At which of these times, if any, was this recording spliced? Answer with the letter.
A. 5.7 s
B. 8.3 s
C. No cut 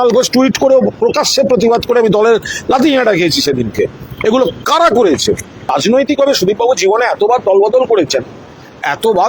A